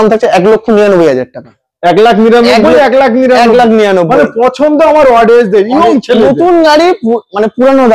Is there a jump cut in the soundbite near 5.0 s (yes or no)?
no